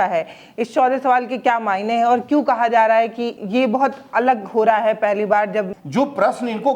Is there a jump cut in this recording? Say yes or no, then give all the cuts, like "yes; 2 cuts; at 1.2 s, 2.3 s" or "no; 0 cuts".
yes; 2 cuts; at 3.4 s, 5.8 s